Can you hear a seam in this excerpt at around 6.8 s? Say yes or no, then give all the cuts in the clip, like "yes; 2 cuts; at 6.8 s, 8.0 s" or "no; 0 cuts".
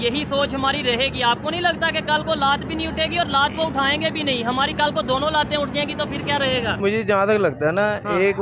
yes; 1 cut; at 6.8 s